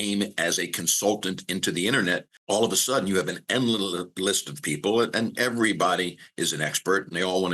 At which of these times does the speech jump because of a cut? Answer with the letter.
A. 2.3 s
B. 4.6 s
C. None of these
A